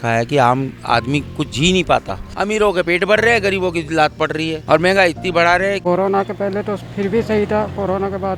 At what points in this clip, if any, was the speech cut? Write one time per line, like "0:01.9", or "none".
0:02.2
0:04.6
0:05.8

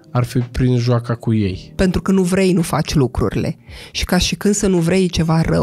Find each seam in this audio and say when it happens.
0:01.7

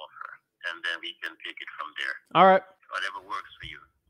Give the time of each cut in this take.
0:02.2
0:02.8

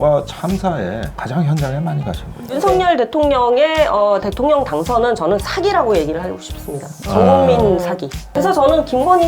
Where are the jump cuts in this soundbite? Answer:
0:02.5
0:08.3

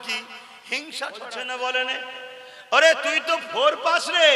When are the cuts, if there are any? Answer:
0:01.3

